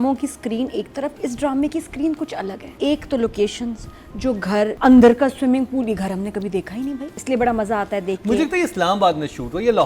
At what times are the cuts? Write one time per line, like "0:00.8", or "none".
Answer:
0:02.6
0:04.7
0:07.1